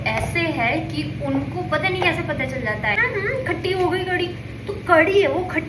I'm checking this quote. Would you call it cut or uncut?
cut